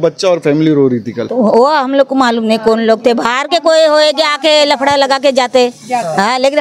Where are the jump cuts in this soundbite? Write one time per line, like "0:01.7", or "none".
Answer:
0:01.2